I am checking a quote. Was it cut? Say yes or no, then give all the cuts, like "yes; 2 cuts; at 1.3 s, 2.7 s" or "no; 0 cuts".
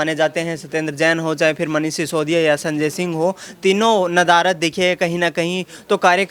no; 0 cuts